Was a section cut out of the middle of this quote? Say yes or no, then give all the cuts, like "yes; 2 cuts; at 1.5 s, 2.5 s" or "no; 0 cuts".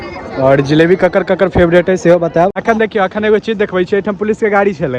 yes; 1 cut; at 2.5 s